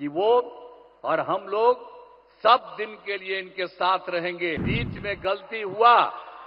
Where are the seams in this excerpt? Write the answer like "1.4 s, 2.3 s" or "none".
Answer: 4.6 s